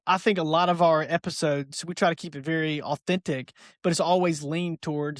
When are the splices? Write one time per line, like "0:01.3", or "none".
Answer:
none